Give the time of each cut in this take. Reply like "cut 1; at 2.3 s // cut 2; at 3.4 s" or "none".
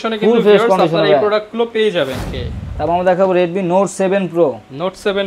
cut 1; at 2.2 s